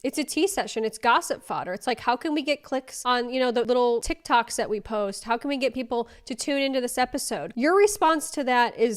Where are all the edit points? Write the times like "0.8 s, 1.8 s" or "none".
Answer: 7.5 s